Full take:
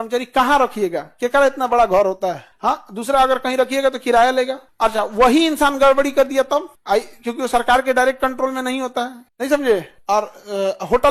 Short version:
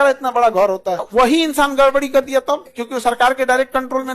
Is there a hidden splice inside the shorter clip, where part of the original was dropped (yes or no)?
yes